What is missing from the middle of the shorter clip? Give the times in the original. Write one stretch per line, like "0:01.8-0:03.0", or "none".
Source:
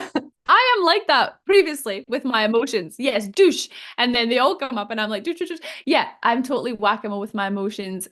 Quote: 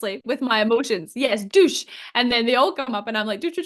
none